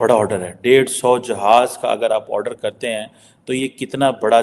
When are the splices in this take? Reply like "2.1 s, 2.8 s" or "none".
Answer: none